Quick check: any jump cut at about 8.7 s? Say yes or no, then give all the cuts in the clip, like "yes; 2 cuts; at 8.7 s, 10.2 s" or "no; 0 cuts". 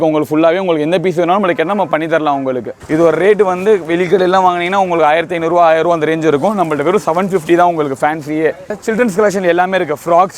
yes; 2 cuts; at 2.7 s, 8.7 s